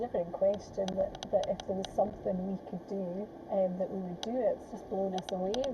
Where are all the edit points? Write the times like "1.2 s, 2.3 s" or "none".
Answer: 1.2 s, 3.4 s, 4.6 s